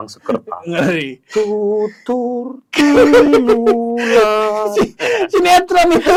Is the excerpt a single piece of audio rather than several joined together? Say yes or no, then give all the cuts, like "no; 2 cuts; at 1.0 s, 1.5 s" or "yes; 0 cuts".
yes; 0 cuts